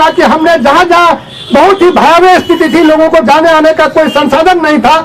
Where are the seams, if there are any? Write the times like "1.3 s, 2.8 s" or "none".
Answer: none